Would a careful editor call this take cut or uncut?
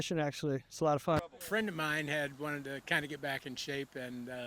cut